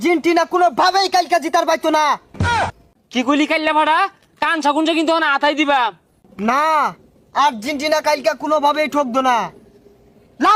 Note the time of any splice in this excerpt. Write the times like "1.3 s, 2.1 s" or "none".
none

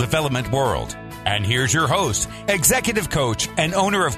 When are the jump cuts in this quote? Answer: none

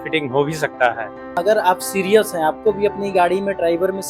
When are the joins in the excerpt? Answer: 1.4 s

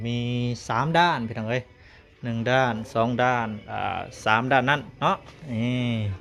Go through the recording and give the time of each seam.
none

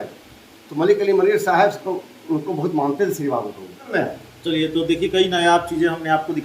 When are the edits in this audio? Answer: 3.9 s

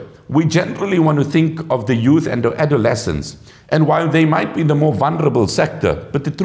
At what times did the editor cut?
none

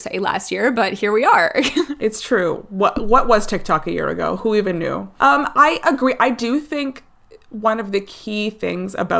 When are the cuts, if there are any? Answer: none

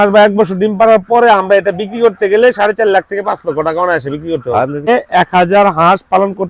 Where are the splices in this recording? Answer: 5.1 s

